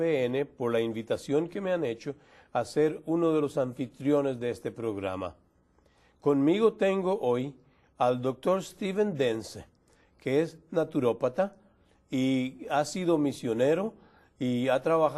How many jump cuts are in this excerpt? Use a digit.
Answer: 1